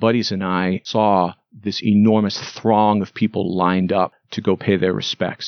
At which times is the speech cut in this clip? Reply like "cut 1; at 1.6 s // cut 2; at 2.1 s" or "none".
cut 1; at 0.9 s // cut 2; at 4.2 s